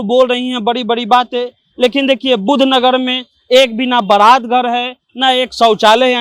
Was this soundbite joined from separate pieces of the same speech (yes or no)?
no